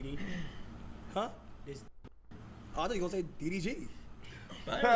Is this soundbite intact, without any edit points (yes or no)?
yes